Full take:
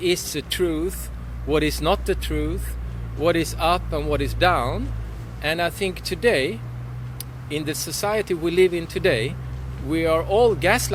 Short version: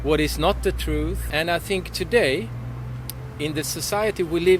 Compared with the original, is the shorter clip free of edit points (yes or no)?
no